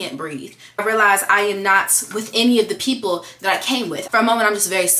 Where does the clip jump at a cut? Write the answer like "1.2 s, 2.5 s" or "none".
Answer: 0.8 s, 4.0 s